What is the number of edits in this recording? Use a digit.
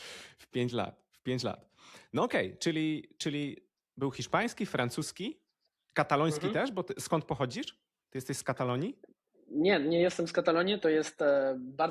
0